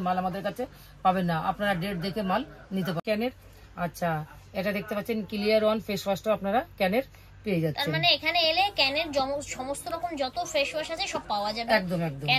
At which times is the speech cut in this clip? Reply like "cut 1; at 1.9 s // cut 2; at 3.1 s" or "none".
cut 1; at 3.0 s